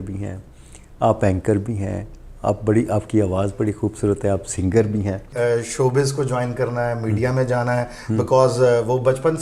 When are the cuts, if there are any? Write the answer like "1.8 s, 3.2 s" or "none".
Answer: 5.3 s